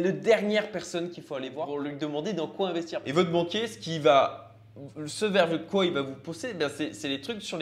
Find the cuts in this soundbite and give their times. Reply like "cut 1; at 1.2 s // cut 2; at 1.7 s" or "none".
cut 1; at 3.0 s